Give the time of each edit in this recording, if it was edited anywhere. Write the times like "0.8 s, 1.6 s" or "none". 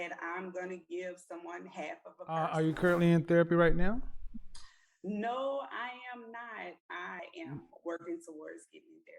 2.4 s, 7.2 s